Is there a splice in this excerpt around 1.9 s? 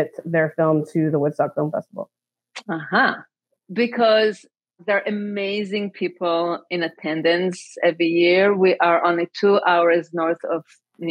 no; 2 cuts; at 3.6 s, 4.8 s

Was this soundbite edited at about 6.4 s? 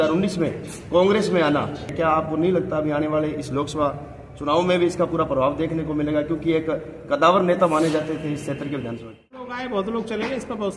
no; 2 cuts; at 2.1 s, 9.6 s

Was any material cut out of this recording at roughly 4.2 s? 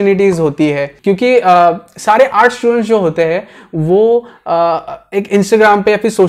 no; 1 cut; at 0.9 s

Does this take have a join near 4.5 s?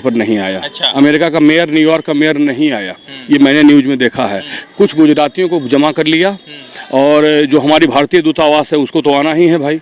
no; 0 cuts

